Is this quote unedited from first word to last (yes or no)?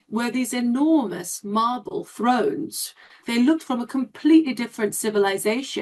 no